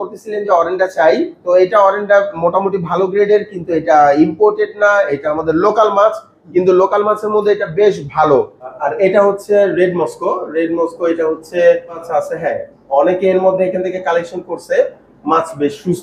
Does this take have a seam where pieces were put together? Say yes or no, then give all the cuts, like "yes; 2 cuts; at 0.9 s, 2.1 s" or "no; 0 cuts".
yes; 2 cuts; at 8.8 s, 12.0 s